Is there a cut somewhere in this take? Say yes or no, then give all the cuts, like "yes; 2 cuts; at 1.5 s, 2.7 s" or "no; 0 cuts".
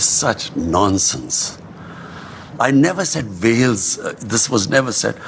no; 0 cuts